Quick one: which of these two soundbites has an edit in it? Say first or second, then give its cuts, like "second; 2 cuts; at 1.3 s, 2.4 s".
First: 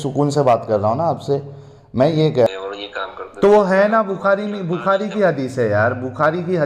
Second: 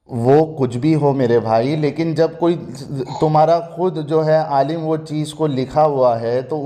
first; 1 cut; at 2.5 s